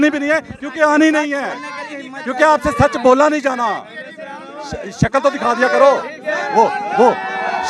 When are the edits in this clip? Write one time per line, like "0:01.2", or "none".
none